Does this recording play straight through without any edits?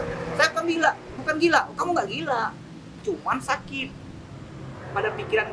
yes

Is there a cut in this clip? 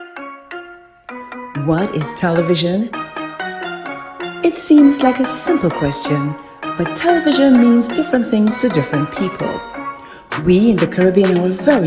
yes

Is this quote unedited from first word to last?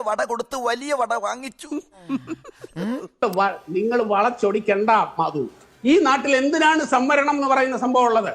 no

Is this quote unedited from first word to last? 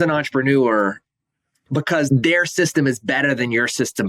no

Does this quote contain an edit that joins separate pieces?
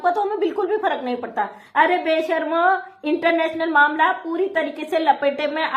yes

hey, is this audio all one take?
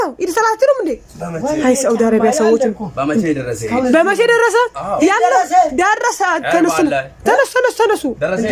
yes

